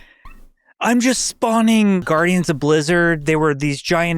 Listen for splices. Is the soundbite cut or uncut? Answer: cut